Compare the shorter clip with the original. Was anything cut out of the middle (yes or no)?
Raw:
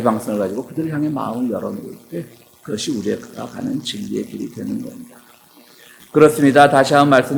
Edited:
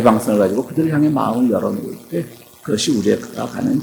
no